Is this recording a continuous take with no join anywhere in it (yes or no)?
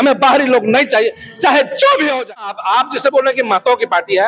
no